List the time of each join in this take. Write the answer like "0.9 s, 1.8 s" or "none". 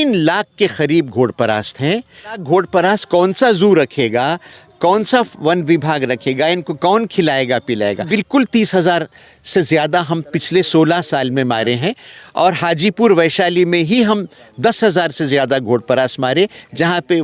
2.4 s, 8.1 s